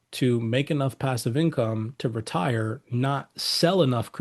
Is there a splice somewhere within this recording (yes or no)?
no